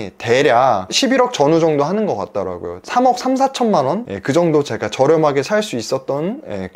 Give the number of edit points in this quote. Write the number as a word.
zero